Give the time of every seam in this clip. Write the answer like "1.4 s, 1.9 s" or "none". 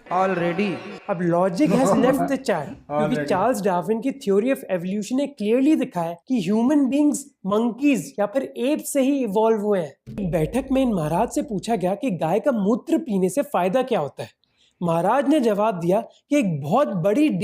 10.2 s

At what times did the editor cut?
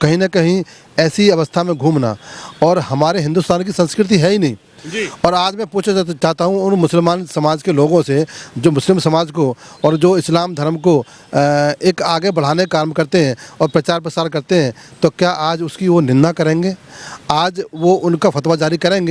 none

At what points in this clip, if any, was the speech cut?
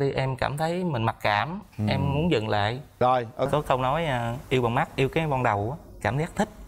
3.5 s

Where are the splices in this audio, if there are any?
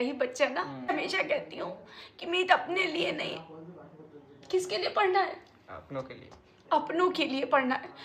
0.9 s

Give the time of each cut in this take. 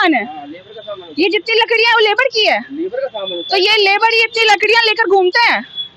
none

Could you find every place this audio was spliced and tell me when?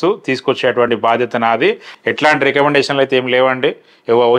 1.9 s

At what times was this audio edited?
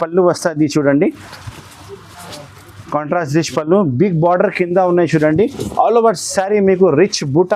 none

